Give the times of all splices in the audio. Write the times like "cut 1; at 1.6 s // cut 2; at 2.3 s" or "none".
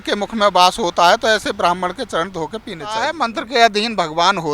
cut 1; at 3.0 s